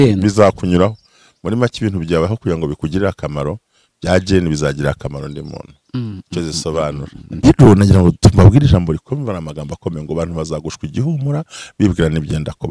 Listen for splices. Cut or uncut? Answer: cut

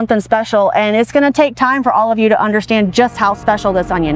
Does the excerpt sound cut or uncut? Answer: uncut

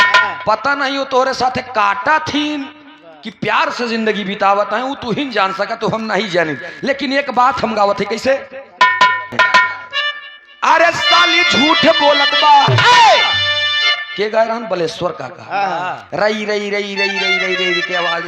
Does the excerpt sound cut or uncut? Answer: cut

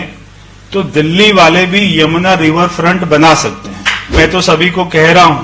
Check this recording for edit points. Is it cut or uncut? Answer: cut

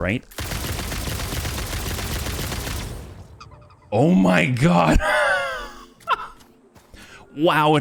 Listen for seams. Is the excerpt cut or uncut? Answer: uncut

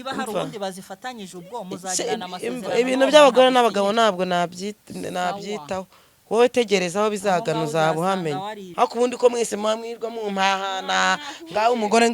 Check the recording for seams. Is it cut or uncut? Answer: cut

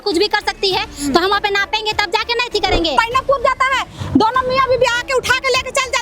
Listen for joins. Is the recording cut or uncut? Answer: cut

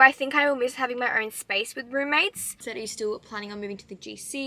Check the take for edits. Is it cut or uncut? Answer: cut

